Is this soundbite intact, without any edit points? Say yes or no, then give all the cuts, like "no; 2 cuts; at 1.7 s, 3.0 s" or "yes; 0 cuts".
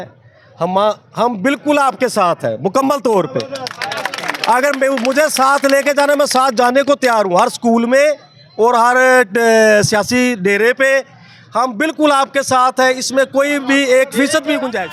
yes; 0 cuts